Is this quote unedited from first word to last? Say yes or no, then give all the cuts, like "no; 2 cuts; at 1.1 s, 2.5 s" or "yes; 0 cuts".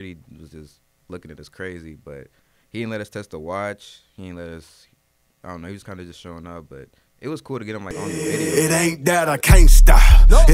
no; 1 cut; at 7.9 s